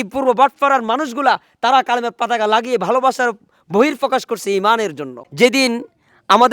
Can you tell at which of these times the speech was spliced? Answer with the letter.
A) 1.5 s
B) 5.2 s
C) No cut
B